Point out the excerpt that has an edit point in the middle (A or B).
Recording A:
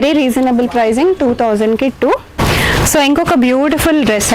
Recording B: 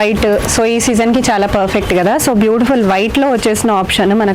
A